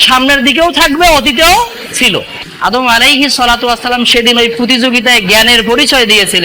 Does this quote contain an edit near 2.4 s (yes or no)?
yes